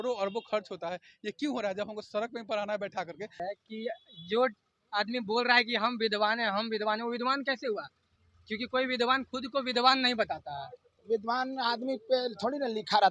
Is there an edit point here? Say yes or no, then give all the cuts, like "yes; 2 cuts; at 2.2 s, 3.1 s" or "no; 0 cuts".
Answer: yes; 1 cut; at 3.4 s